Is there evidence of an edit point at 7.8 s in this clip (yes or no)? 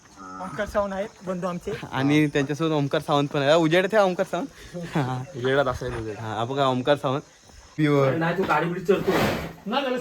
yes